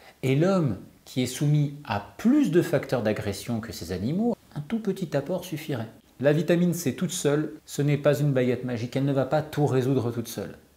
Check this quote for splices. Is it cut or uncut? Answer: cut